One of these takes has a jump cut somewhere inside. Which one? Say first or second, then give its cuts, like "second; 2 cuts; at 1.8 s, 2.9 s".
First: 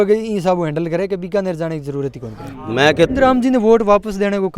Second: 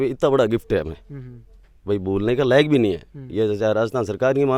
first; 1 cut; at 3.1 s